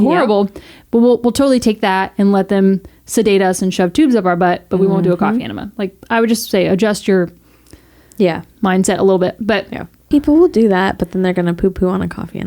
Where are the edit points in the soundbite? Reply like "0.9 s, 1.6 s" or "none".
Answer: 10.1 s